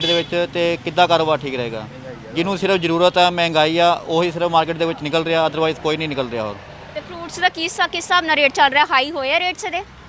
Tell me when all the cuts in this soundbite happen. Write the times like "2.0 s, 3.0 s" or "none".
none